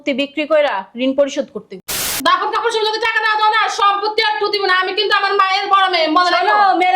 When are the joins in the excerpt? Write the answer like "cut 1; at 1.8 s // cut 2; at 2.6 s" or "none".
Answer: cut 1; at 2.1 s